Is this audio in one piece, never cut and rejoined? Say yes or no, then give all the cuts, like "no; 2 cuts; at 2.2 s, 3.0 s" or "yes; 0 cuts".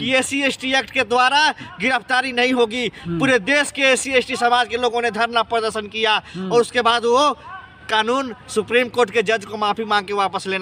yes; 0 cuts